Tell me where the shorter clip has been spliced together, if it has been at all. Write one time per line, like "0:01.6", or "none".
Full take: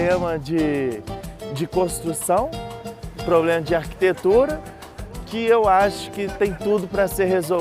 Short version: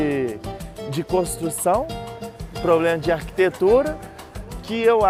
none